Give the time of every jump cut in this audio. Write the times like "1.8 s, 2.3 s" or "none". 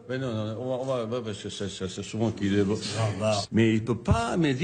3.4 s

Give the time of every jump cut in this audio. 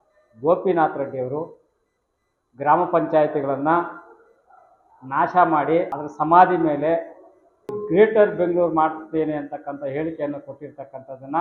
6.0 s, 7.8 s

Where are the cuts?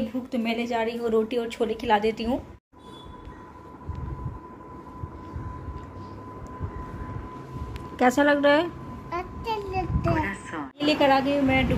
none

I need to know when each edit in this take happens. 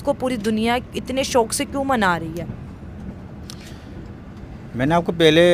none

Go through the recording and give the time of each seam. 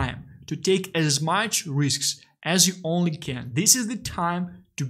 none

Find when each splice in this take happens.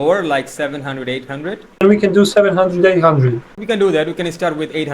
1.8 s, 3.5 s

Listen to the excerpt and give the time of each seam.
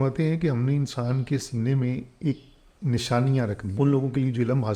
3.7 s

